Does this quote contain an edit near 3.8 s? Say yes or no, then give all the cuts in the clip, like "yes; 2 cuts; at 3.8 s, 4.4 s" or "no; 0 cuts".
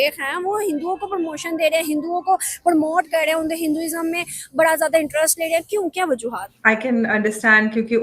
no; 1 cut; at 6.5 s